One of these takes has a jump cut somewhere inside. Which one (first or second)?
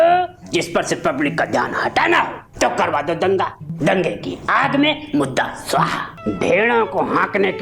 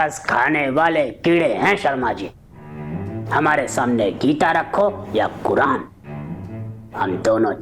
first